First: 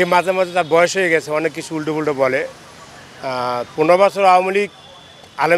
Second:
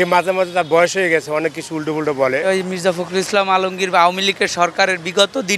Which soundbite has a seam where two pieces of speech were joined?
second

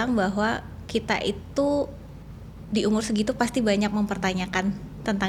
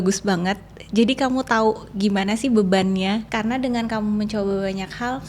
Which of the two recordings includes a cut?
second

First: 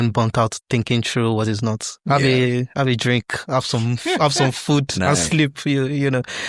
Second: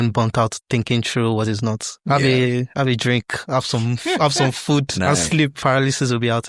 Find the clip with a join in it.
second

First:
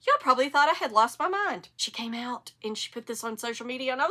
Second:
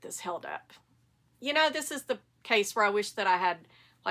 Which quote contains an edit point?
first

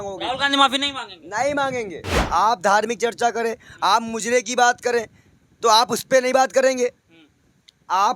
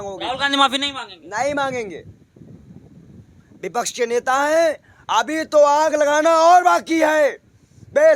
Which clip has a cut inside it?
first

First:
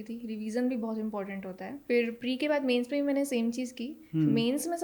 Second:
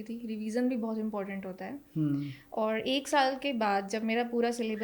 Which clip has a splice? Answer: first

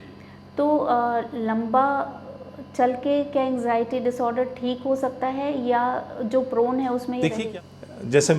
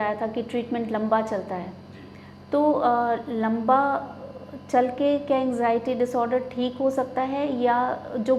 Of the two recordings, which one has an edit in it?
first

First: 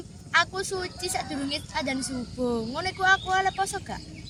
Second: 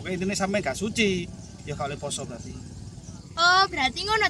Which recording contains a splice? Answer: second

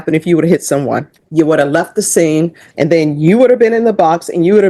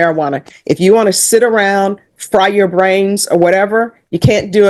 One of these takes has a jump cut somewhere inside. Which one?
first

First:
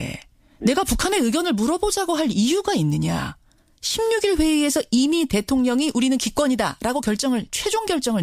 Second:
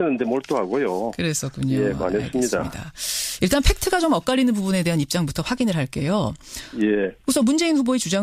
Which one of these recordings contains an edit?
first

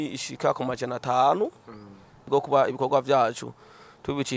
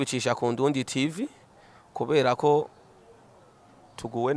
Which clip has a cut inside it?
first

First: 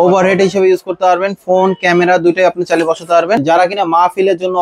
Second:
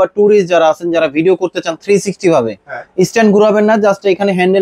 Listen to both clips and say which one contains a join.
first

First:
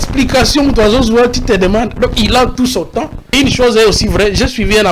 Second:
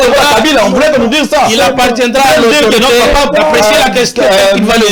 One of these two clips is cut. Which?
first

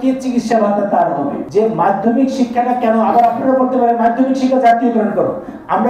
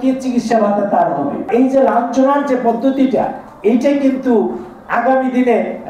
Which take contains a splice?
second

